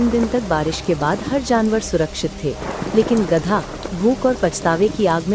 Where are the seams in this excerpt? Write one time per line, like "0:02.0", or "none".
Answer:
none